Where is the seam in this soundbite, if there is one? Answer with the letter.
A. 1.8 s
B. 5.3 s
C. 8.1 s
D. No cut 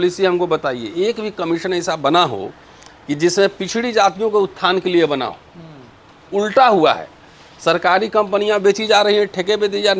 D